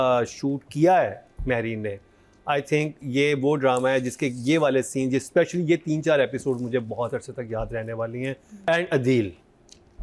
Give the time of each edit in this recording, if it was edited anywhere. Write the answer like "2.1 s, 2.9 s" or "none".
8.7 s